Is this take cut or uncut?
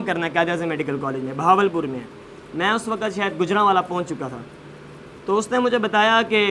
uncut